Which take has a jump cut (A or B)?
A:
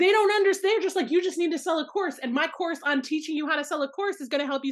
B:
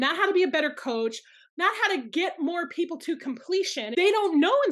B